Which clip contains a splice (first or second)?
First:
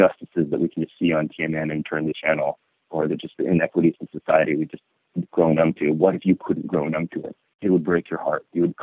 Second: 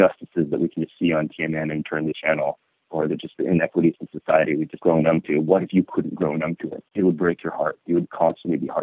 second